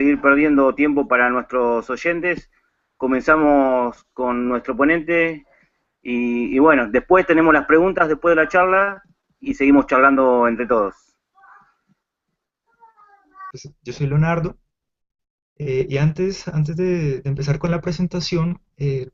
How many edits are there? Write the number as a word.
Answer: zero